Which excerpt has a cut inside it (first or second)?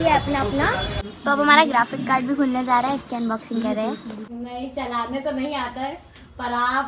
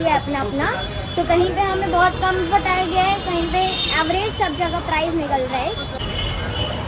first